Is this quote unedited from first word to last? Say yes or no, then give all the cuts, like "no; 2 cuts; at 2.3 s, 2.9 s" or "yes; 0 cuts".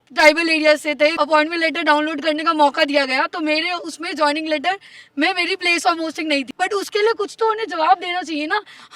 no; 2 cuts; at 1.1 s, 6.5 s